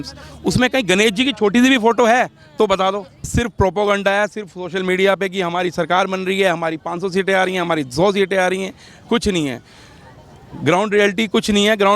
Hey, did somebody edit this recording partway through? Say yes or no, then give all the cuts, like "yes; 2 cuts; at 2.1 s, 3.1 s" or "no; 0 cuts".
yes; 1 cut; at 3.3 s